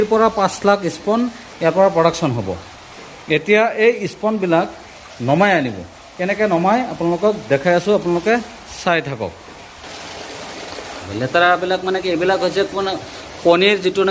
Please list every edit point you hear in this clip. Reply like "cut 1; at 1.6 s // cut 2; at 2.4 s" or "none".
none